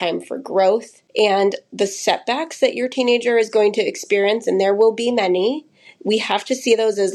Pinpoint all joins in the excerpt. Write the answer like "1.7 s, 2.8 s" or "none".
none